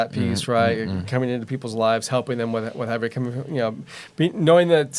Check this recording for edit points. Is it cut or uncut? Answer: uncut